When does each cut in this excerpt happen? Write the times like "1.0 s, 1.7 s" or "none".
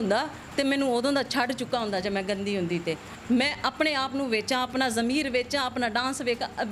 3.1 s